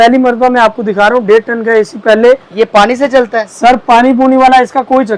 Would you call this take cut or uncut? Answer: uncut